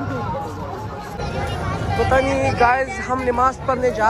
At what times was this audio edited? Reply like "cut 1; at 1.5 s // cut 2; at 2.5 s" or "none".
cut 1; at 1.2 s